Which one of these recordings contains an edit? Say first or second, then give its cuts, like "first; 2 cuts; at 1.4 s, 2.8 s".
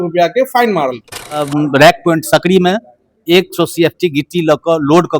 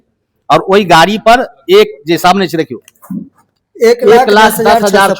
first; 1 cut; at 1.5 s